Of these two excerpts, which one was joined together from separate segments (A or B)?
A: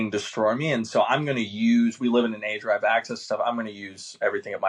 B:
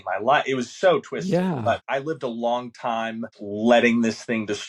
B